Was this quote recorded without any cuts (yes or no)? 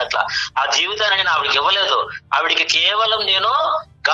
yes